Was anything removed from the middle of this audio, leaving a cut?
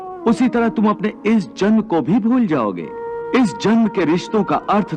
yes; 1 cut; at 3.0 s

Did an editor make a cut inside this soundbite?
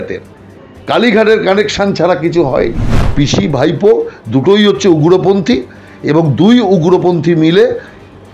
yes; 1 cut; at 3.1 s

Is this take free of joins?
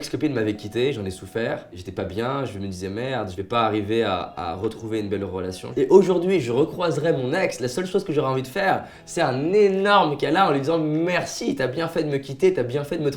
no; 2 cuts; at 1.8 s, 5.6 s

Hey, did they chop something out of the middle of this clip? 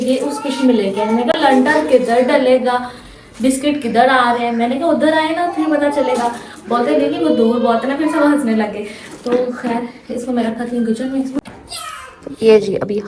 no; 0 cuts

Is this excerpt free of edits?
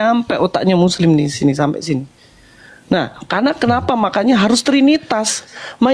no; 1 cut; at 2.3 s

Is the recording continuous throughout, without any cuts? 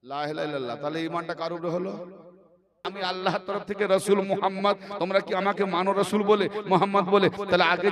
no; 1 cut; at 2.9 s

